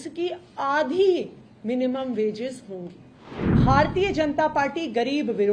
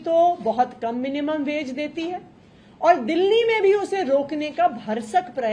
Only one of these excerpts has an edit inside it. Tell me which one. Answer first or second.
first